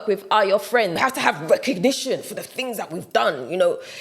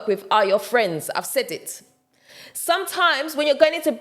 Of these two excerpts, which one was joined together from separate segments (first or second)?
first